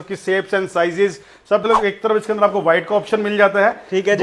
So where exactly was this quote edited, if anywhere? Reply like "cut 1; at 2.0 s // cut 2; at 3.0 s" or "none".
cut 1; at 1.6 s